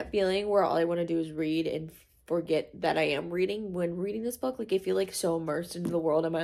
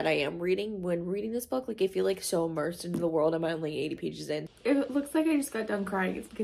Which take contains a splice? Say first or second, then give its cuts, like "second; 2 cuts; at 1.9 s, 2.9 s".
second; 1 cut; at 4.5 s